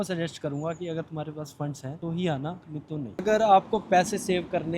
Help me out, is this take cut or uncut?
cut